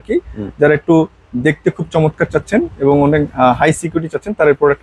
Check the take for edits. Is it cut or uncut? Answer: uncut